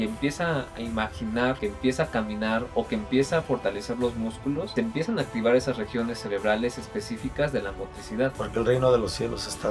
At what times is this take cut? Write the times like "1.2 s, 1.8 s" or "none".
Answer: 1.6 s, 4.7 s, 8.4 s